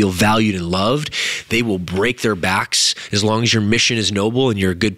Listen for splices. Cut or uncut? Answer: uncut